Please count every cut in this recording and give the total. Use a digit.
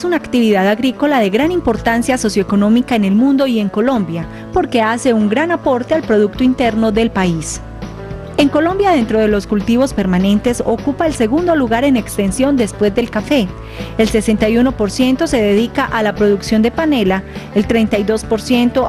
0